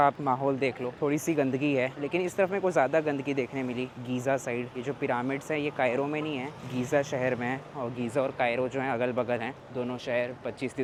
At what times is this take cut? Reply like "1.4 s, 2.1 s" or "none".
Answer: none